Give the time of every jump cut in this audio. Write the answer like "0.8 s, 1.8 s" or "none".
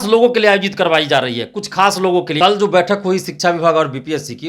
2.4 s